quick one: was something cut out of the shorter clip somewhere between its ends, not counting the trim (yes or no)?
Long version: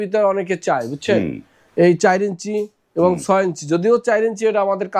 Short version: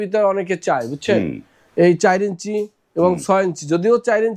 no